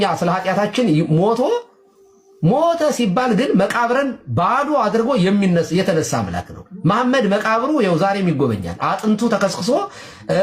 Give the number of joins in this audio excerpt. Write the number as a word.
zero